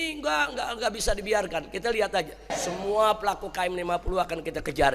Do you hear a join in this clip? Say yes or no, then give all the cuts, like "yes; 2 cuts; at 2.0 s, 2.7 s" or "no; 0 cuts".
yes; 1 cut; at 2.6 s